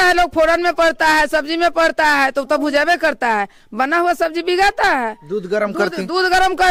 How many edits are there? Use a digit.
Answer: 0